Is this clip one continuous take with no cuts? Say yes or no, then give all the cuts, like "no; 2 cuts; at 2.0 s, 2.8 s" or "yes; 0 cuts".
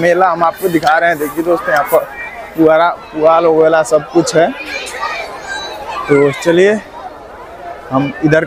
yes; 0 cuts